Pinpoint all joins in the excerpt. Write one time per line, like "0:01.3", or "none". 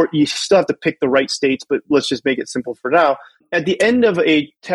0:03.5